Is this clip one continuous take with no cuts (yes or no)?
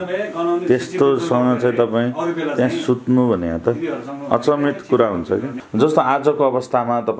no